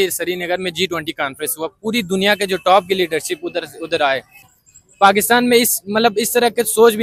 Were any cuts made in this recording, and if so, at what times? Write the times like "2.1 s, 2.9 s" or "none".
4.5 s